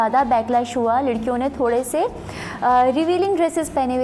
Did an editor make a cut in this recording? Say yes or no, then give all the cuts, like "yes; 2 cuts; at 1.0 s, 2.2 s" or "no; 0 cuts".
no; 0 cuts